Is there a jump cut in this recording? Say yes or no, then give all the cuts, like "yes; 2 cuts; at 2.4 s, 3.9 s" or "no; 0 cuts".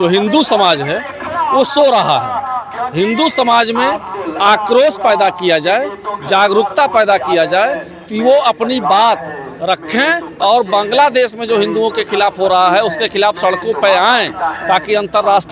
no; 0 cuts